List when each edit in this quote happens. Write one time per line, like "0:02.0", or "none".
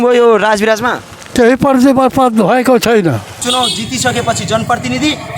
0:03.3

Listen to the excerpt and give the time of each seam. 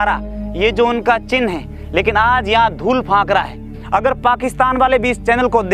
0:03.7

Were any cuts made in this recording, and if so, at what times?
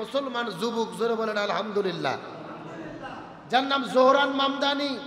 none

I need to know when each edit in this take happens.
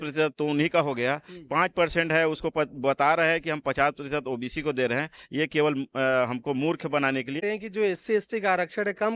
0:07.4

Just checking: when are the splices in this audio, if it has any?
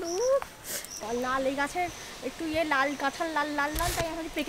0:01.0

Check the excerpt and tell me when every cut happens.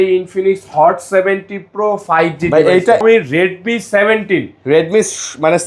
0:03.0

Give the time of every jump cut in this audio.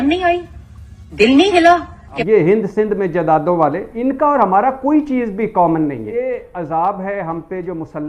0:02.1
0:06.0

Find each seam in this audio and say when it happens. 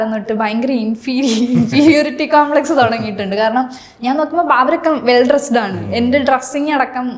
none

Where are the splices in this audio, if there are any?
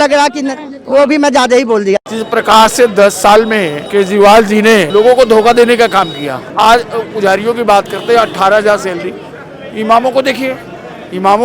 0:02.1
0:03.8
0:04.9
0:06.5

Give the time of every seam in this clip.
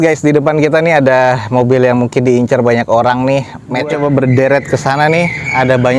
0:03.9

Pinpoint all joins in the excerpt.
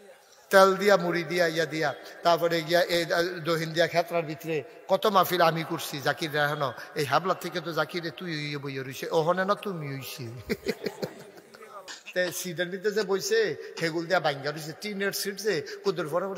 0:12.0

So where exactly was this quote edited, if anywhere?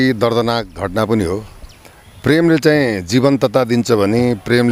none

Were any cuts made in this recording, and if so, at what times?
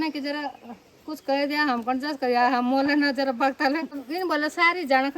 0:03.9

